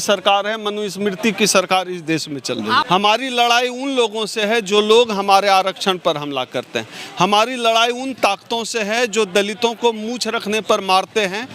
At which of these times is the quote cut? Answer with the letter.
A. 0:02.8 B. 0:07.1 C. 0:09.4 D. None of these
A